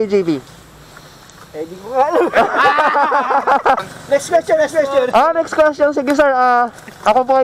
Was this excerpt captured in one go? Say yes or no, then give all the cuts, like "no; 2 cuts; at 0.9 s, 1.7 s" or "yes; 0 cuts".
no; 1 cut; at 3.9 s